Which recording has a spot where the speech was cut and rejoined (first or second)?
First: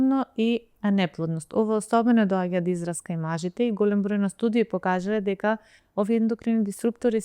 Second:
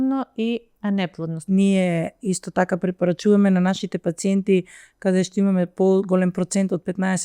second